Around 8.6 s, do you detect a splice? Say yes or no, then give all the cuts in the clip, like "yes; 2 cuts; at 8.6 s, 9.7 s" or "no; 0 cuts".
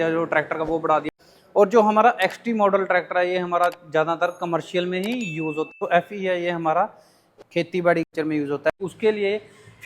yes; 3 cuts; at 1.0 s, 5.7 s, 8.6 s